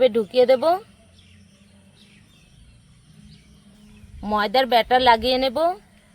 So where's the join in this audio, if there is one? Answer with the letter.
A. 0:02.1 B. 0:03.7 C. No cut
B